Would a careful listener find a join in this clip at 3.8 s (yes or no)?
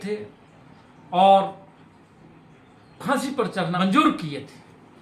yes